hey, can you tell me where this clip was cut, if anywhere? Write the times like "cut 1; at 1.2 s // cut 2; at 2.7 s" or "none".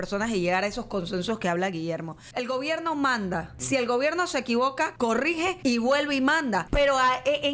cut 1; at 2.2 s // cut 2; at 3.5 s // cut 3; at 5.1 s // cut 4; at 6.7 s